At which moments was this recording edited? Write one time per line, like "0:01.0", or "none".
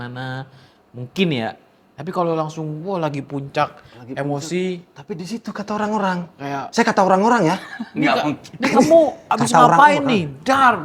none